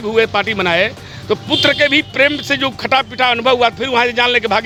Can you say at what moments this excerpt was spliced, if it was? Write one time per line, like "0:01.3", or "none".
none